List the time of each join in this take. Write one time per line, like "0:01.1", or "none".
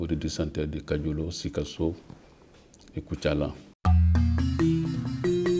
0:03.7